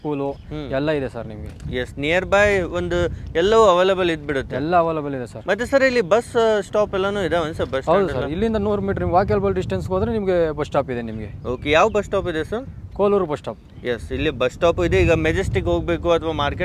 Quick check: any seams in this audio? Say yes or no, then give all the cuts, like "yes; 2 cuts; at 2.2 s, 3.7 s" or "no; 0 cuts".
no; 0 cuts